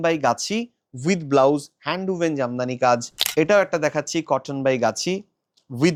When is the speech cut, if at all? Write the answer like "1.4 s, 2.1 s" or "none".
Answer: none